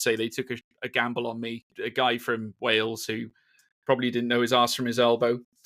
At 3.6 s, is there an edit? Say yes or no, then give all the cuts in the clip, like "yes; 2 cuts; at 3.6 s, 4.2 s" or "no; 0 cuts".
no; 1 cut; at 1.7 s